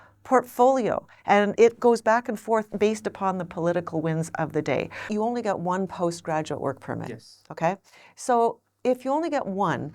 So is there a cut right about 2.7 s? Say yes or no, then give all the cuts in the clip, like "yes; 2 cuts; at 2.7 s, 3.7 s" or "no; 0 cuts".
yes; 3 cuts; at 1.5 s, 2.7 s, 5.1 s